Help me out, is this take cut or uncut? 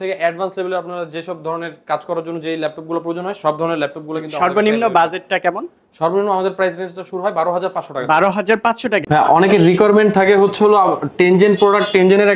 cut